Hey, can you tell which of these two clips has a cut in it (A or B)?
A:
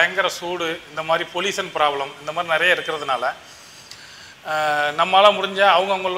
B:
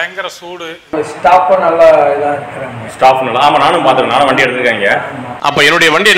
B